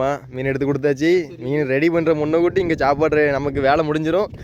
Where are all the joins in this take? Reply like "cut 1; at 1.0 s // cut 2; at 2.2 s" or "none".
none